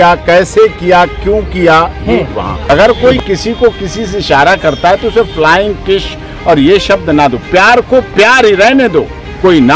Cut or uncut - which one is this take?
cut